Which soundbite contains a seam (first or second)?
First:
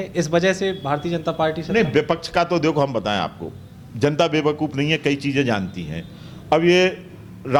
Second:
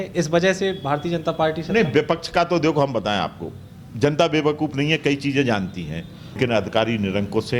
second